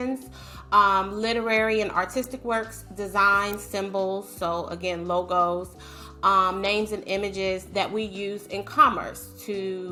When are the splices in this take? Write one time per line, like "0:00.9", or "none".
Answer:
none